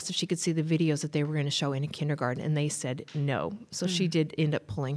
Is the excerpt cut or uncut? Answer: uncut